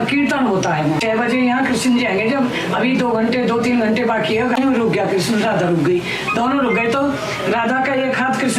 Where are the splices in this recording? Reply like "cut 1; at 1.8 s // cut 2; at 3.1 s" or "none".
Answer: cut 1; at 1.0 s // cut 2; at 4.6 s